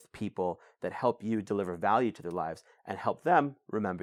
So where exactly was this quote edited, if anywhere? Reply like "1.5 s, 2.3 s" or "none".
none